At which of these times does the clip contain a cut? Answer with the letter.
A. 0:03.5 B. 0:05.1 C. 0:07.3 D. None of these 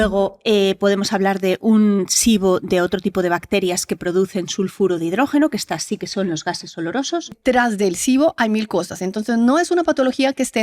C